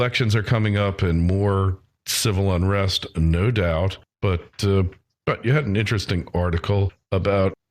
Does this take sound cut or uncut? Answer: cut